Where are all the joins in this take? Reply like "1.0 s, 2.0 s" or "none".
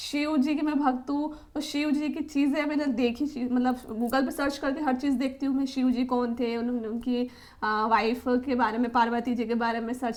none

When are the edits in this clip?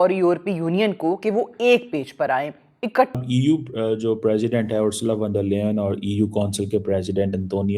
3.1 s

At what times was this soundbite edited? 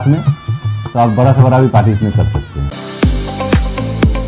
2.7 s

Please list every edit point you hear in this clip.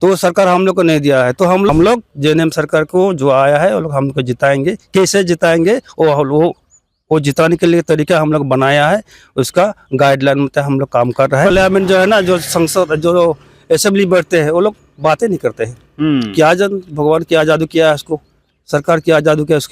1.7 s, 11.5 s

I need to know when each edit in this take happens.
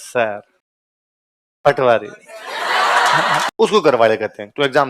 3.5 s

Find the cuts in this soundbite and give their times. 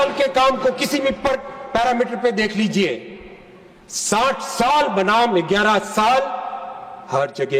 none

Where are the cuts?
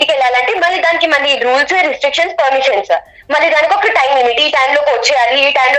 none

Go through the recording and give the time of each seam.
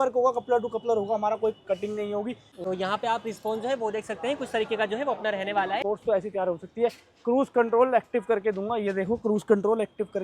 2.5 s, 5.8 s

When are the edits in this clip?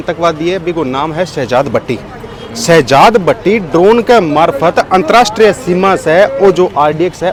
none

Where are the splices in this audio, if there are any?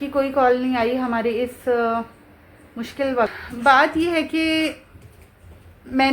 3.4 s

